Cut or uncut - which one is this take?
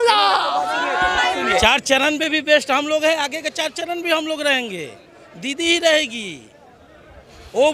cut